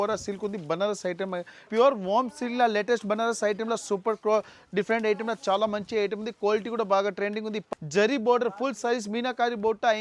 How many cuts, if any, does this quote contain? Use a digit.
2